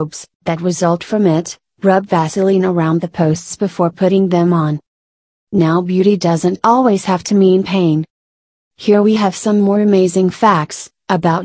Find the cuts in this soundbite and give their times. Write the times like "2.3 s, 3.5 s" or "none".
2.6 s

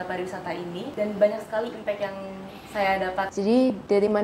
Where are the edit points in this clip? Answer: 0.9 s, 3.3 s

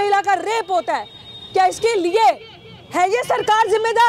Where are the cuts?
none

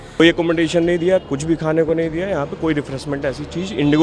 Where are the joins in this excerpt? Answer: none

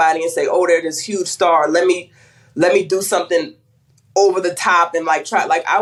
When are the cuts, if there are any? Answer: none

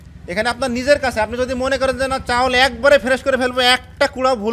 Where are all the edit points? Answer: none

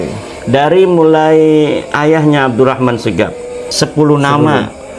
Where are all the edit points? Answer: 3.6 s

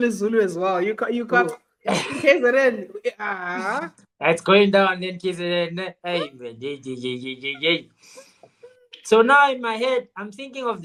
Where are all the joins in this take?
none

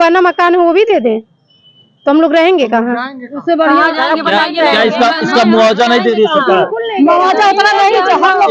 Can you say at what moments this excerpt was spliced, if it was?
none

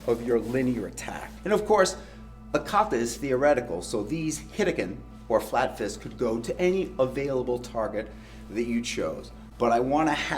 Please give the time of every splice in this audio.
1.3 s, 2.5 s

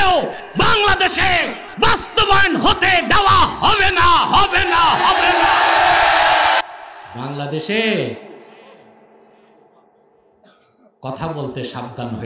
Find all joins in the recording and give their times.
6.6 s

